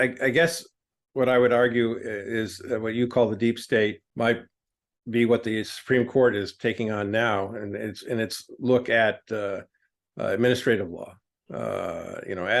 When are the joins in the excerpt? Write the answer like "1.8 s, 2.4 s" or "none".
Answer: 4.0 s